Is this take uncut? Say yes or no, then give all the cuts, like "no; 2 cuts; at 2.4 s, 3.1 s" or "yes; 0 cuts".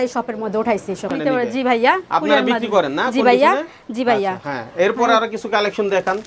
yes; 0 cuts